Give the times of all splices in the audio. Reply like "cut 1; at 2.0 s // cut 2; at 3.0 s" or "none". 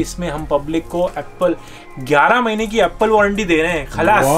none